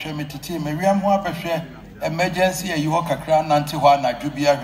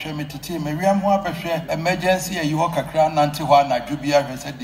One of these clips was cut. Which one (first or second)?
second